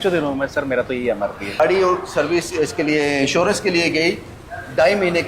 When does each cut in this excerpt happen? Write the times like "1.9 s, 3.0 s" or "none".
1.6 s